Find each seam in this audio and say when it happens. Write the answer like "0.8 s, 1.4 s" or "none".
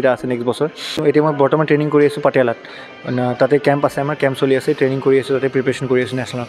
0.9 s